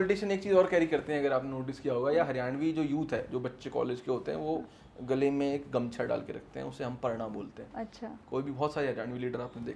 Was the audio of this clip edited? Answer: no; 0 cuts

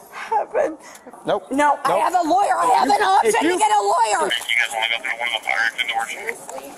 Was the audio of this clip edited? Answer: yes; 2 cuts; at 1.2 s, 4.4 s

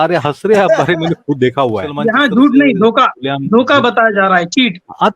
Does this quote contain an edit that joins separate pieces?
yes; 1 cut; at 2.0 s

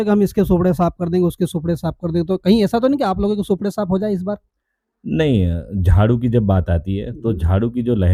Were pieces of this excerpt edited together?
no; 0 cuts

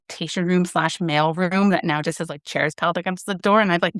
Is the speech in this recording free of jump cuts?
yes; 0 cuts

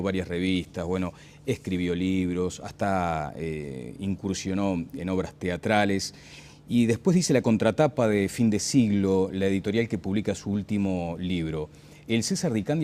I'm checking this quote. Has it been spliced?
yes; 1 cut; at 3.8 s

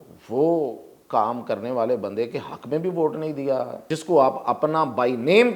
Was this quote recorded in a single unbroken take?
no; 1 cut; at 3.8 s

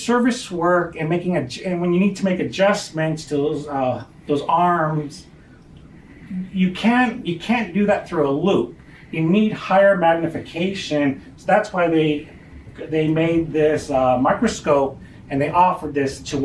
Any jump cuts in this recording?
no; 0 cuts

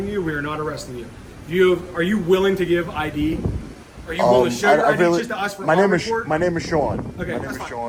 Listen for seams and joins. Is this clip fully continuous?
yes; 0 cuts

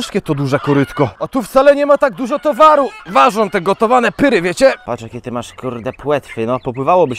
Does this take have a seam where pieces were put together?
yes; 3 cuts; at 1.2 s, 3.0 s, 4.8 s

